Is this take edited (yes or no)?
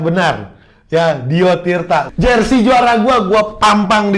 yes